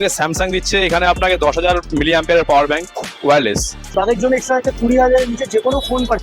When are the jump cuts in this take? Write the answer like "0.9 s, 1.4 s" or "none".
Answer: 3.9 s